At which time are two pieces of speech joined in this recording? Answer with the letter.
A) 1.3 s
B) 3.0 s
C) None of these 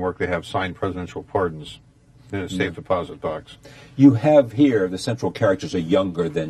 B